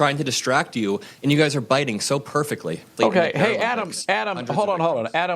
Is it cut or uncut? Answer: cut